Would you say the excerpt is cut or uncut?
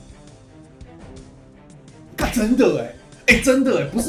uncut